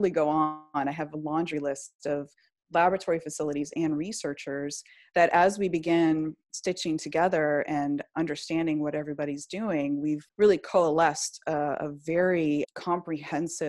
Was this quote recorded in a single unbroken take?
no; 2 cuts; at 10.3 s, 12.7 s

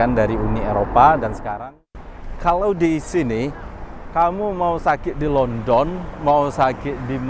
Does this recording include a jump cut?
yes; 1 cut; at 1.4 s

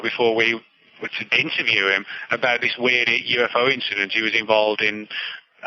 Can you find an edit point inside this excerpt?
yes; 1 cut; at 1.2 s

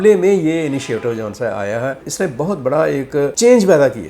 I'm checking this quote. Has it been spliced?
yes; 1 cut; at 2.1 s

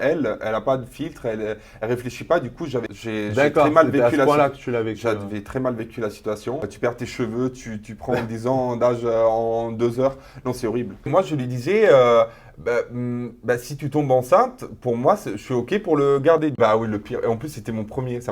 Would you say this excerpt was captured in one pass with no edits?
no; 4 cuts; at 2.9 s, 6.7 s, 11.1 s, 16.6 s

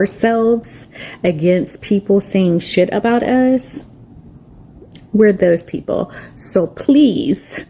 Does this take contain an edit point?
no; 0 cuts

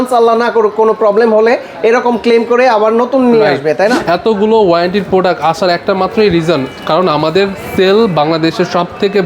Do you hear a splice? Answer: yes; 1 cut; at 4.0 s

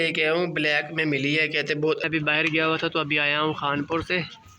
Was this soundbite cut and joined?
yes; 1 cut; at 2.1 s

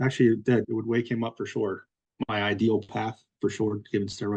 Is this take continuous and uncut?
no; 1 cut; at 1.9 s

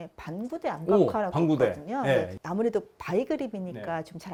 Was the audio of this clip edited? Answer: no; 0 cuts

